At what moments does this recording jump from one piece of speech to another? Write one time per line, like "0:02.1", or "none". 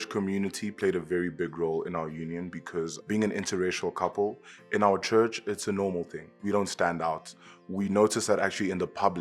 none